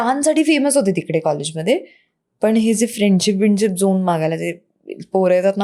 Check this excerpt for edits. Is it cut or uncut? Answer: uncut